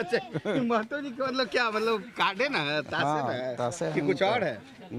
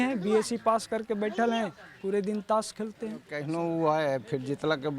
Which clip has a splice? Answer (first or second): second